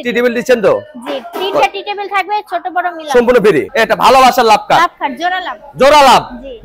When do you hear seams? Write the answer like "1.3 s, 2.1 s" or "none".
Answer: 3.7 s

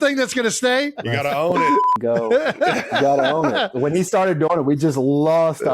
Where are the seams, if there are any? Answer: 0.9 s, 3.7 s

